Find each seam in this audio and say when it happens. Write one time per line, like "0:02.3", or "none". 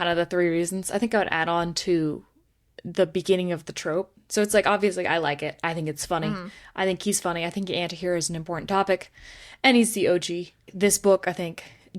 0:04.2
0:10.7